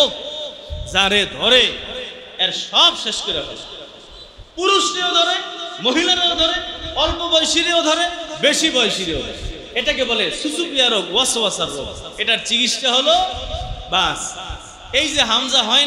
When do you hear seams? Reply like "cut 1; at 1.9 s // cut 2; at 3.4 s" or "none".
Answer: none